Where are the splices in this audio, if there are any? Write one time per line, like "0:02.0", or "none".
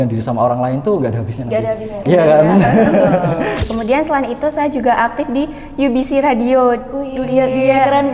0:03.7